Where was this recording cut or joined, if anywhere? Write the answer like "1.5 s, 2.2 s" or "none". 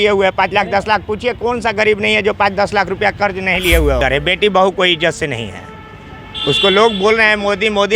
4.0 s